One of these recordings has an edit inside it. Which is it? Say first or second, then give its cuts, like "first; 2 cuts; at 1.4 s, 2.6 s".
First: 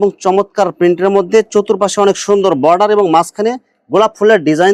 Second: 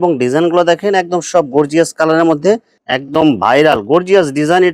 second; 1 cut; at 2.8 s